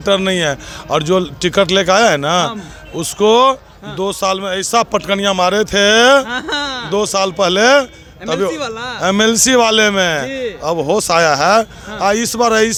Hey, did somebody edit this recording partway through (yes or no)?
no